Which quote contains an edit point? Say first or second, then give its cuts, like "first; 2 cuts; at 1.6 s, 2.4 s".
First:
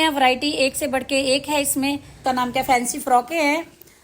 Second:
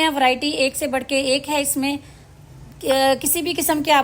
first; 1 cut; at 2.4 s